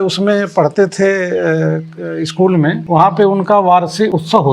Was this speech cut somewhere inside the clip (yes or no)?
yes